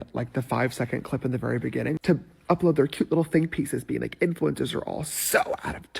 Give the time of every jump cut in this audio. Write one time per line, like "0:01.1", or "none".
0:02.0